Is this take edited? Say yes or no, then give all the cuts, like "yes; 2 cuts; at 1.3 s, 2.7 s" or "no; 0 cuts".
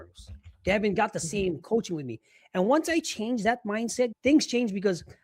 yes; 1 cut; at 4.1 s